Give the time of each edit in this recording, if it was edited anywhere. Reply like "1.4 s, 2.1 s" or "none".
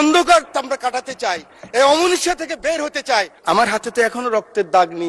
3.3 s